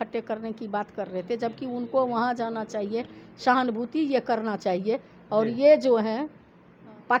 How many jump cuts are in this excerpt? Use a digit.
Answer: 0